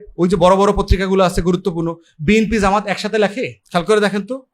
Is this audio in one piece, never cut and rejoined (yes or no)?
no